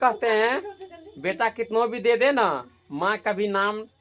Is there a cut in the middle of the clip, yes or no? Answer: no